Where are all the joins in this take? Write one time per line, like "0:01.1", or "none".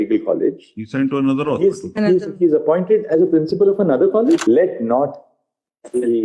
0:04.4